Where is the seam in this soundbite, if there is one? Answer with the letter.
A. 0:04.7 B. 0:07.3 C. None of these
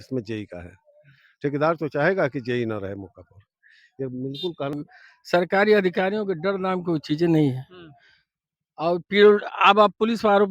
A